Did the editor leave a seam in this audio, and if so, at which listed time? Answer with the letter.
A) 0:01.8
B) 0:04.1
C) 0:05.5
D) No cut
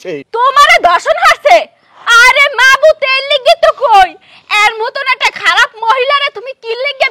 D